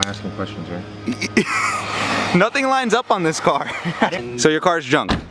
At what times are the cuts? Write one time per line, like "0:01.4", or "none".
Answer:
0:04.2